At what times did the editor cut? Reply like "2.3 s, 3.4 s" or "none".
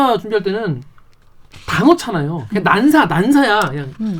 none